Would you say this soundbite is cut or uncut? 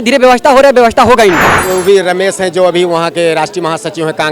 cut